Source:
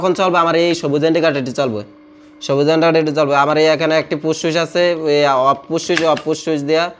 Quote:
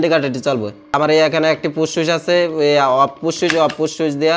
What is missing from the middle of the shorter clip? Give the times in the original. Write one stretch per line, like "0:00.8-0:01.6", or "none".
0:02.1-0:03.4